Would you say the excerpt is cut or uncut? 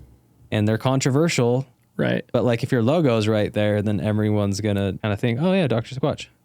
cut